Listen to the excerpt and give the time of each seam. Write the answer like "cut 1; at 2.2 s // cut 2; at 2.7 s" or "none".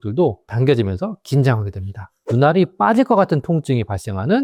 none

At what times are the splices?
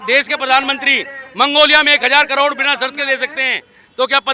none

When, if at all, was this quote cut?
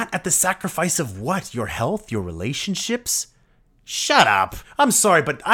cut 1; at 4.6 s

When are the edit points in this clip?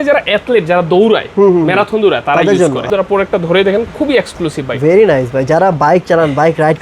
cut 1; at 2.8 s

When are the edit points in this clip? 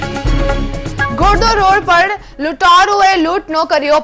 cut 1; at 1.0 s

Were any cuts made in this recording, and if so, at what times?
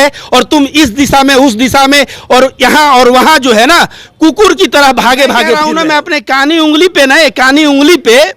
cut 1; at 5.6 s

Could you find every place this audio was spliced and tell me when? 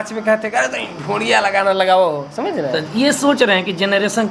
none

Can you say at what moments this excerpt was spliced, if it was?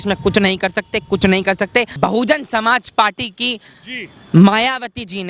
cut 1; at 1.9 s

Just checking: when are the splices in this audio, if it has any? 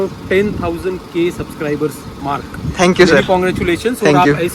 none

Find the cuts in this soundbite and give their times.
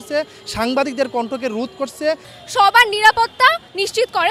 cut 1; at 2.3 s

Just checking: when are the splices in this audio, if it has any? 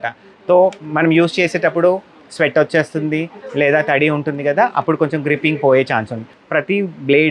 cut 1; at 6.3 s

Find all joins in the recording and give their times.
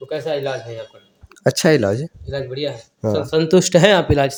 none

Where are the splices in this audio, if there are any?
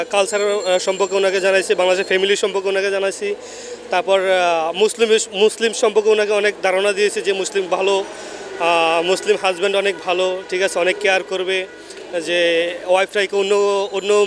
none

